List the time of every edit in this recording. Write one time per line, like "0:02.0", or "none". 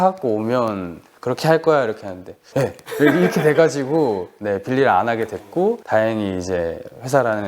none